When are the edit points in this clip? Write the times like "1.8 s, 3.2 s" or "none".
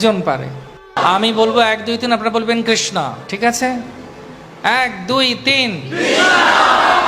1.0 s